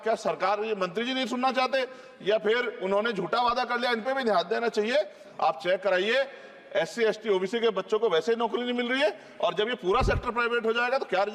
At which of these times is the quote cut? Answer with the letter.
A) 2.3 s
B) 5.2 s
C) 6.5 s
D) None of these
B